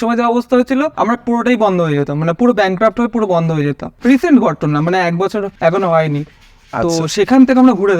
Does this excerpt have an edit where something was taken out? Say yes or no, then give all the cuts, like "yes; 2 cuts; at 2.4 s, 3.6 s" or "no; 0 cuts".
yes; 3 cuts; at 0.9 s, 3.9 s, 5.5 s